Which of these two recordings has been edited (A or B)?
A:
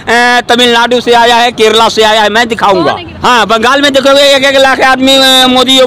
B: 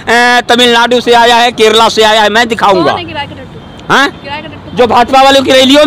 A